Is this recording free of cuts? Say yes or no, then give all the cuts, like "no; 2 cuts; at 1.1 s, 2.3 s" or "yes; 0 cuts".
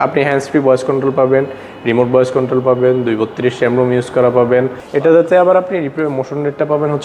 no; 1 cut; at 4.8 s